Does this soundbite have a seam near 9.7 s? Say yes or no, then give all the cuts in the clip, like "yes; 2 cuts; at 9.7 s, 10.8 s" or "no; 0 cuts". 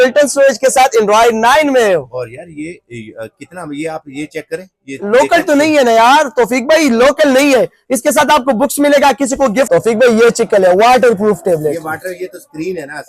yes; 1 cut; at 9.7 s